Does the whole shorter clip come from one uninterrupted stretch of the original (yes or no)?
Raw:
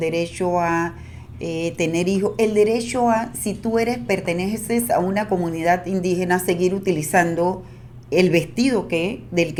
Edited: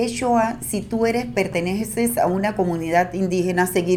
yes